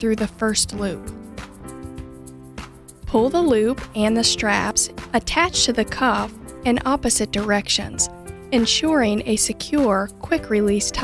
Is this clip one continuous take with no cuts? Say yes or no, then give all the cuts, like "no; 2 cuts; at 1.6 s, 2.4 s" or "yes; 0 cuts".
no; 2 cuts; at 1.0 s, 3.0 s